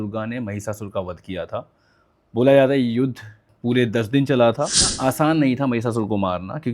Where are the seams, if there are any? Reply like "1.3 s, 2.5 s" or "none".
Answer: 4.9 s